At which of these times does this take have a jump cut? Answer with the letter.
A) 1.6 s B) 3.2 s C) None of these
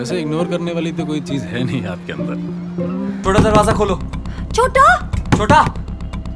B